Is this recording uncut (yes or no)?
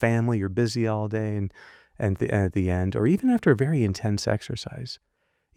yes